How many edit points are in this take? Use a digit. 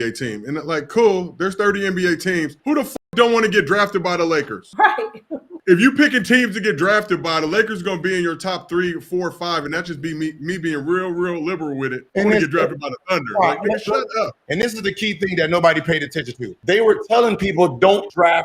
3